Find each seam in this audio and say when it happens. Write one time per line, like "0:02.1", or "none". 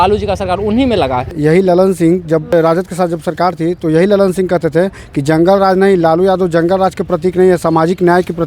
0:01.3
0:02.5